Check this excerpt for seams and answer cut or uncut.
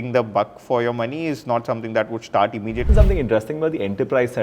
cut